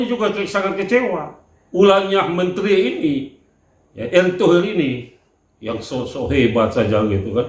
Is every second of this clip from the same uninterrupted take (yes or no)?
yes